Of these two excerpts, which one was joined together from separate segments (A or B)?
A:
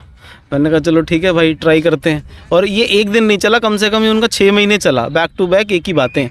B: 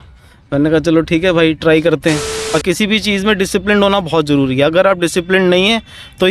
B